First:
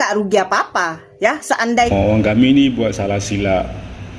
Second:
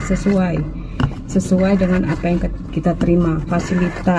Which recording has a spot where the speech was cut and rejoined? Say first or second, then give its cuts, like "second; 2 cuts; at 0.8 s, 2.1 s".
first; 1 cut; at 1.9 s